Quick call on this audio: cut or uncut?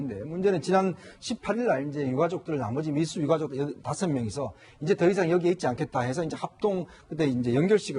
cut